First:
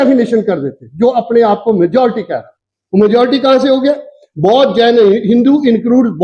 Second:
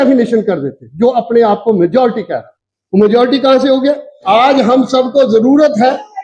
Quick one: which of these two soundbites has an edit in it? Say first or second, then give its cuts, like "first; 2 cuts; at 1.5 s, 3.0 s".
second; 1 cut; at 4.2 s